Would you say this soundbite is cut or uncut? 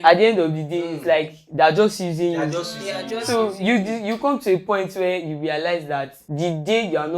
cut